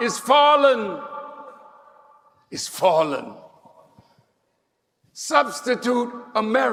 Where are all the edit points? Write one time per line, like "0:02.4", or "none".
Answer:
none